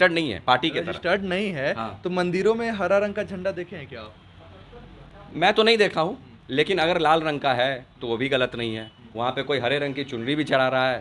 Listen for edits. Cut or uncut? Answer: uncut